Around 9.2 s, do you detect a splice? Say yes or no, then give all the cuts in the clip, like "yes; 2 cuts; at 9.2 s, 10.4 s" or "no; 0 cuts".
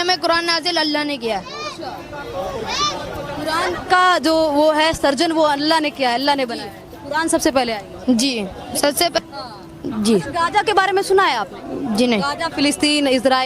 yes; 1 cut; at 9.2 s